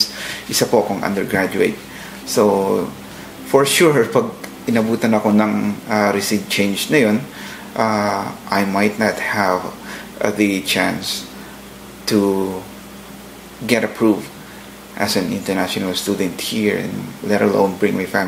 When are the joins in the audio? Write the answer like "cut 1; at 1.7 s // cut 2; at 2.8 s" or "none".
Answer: none

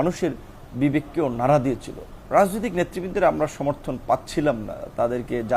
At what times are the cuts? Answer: cut 1; at 2.2 s

